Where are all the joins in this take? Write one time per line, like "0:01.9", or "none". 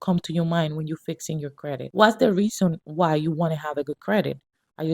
0:01.9